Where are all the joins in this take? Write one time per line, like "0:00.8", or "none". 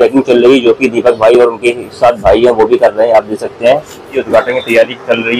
0:04.1

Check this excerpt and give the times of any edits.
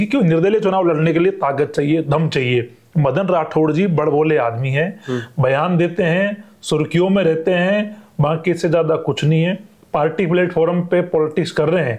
none

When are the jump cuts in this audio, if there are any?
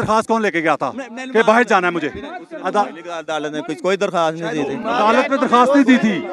none

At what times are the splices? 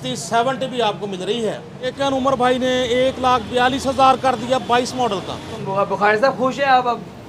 0:01.9
0:05.8

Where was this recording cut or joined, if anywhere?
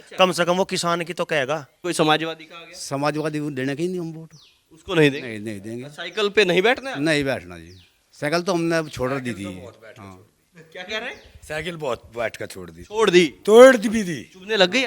0:01.7

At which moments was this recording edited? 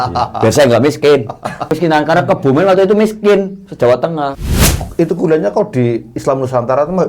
0:01.7
0:04.7

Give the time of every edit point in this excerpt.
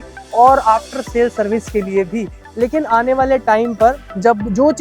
0:02.4

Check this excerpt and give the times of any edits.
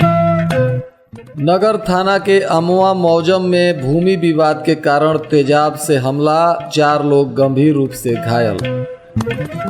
0:00.9

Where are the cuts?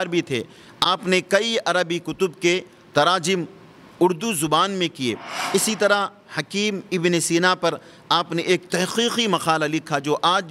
0:05.3

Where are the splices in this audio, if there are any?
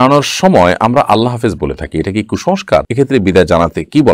0:02.9

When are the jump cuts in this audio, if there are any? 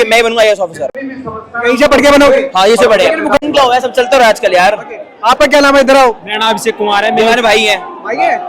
none

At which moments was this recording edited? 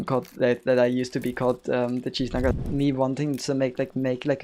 0:02.5

